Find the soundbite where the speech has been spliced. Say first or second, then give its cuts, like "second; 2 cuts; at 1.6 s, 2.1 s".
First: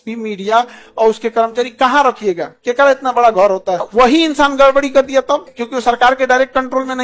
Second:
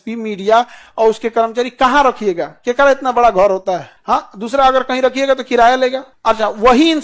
first; 2 cuts; at 3.9 s, 5.5 s